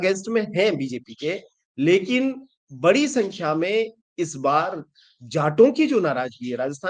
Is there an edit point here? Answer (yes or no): no